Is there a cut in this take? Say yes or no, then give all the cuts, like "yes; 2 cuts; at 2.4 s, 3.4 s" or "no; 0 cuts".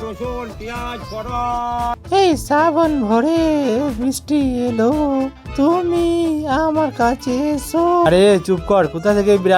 yes; 2 cuts; at 2.0 s, 8.1 s